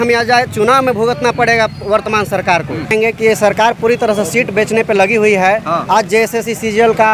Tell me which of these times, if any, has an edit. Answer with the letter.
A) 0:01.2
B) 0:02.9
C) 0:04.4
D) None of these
B